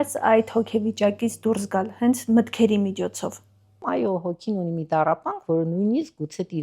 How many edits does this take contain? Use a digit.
1